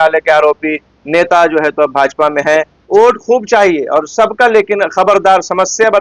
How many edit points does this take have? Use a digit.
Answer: 1